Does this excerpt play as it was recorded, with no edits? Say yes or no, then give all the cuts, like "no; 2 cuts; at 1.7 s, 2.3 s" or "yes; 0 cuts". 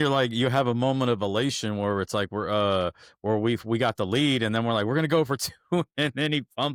yes; 0 cuts